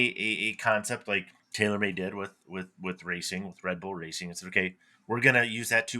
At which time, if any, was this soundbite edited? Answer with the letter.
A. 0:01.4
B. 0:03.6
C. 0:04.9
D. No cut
A